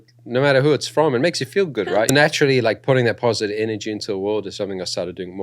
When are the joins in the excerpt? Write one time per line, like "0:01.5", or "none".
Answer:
0:02.1